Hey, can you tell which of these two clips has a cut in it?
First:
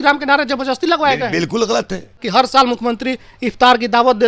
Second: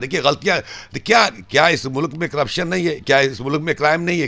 first; 1 cut; at 2.2 s

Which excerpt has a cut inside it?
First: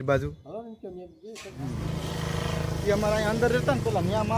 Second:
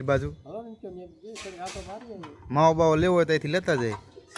first; 1 cut; at 1.5 s

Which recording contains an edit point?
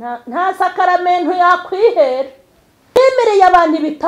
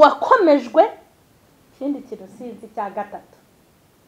first; 1 cut; at 3.0 s

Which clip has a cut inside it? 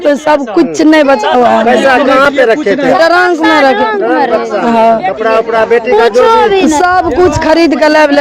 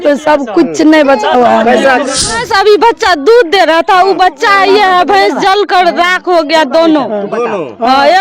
second; 1 cut; at 2.2 s

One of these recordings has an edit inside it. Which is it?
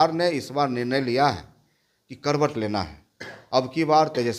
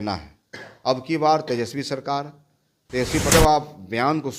second; 1 cut; at 3.3 s

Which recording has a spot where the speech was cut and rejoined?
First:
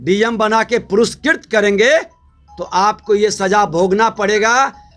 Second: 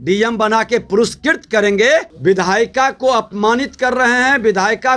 second; 1 cut; at 2.1 s

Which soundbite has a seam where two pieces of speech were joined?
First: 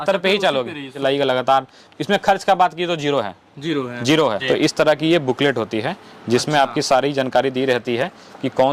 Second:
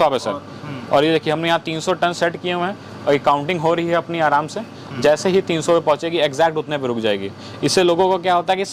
first; 2 cuts; at 0.9 s, 4.3 s

